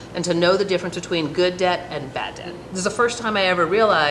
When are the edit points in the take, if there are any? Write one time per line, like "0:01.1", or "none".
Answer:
0:02.6